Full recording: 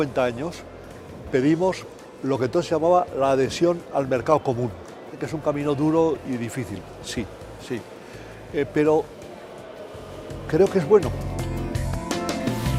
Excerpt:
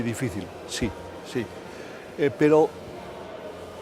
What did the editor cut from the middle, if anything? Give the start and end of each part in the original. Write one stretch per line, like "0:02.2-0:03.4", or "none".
none